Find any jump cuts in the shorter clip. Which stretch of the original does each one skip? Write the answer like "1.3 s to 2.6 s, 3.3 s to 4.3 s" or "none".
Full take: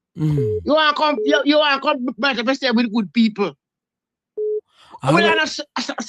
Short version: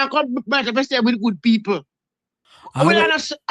4.2 s to 4.8 s